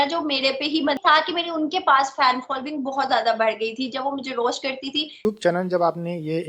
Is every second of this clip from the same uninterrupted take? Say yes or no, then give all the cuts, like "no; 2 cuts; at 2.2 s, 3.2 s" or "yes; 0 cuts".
no; 2 cuts; at 1.0 s, 5.2 s